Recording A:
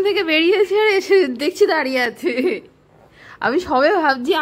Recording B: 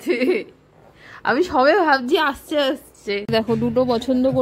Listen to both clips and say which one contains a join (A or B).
B